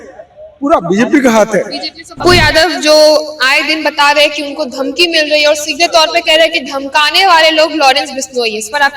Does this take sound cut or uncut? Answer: cut